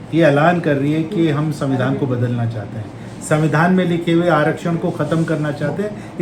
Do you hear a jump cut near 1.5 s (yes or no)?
no